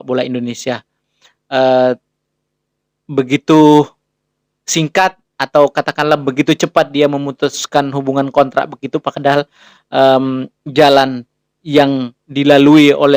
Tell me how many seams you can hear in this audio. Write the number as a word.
zero